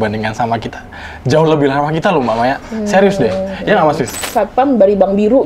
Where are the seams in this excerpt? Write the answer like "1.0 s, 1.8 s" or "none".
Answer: 4.2 s